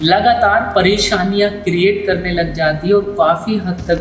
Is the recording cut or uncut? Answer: uncut